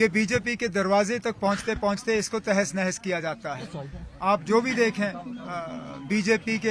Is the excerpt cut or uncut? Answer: uncut